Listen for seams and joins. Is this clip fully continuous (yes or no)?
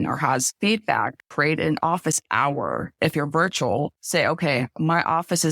no